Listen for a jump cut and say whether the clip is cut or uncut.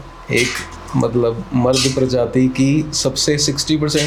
uncut